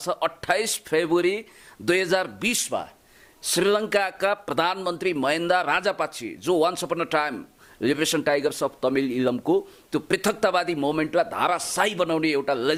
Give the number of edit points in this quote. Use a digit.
0